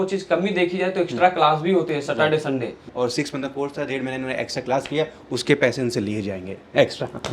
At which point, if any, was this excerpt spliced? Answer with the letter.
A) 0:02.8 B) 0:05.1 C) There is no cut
A